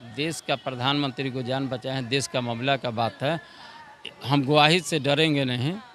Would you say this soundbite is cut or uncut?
uncut